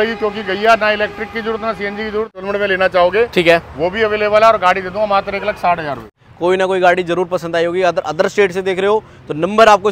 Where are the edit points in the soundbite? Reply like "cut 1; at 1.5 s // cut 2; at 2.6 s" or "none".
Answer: cut 1; at 2.4 s // cut 2; at 6.2 s